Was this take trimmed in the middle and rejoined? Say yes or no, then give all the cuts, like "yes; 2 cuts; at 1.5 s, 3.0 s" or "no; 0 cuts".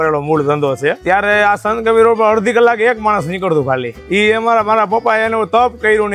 yes; 2 cuts; at 1.0 s, 3.9 s